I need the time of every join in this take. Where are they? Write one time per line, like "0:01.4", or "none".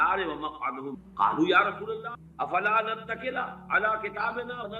0:02.2